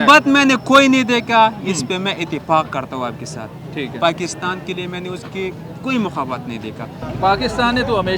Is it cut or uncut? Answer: uncut